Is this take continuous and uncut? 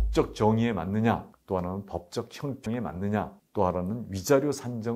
yes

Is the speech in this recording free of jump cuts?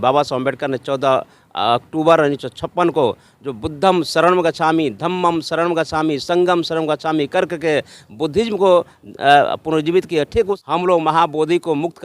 no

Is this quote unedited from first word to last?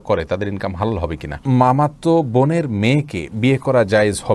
no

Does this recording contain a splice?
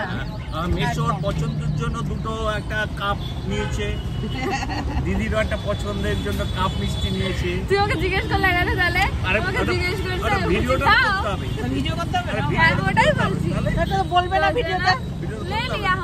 no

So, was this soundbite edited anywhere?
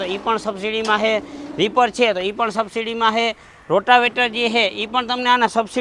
no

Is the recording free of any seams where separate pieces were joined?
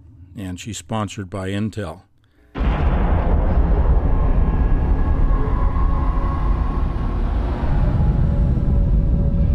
no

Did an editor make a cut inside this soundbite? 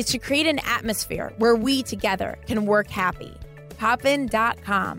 no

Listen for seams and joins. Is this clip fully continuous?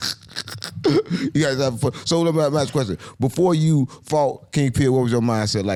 yes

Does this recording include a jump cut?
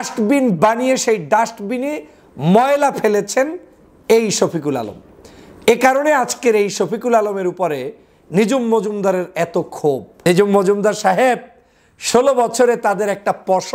yes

